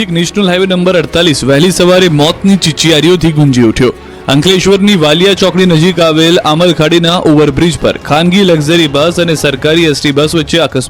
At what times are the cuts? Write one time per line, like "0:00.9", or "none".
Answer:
none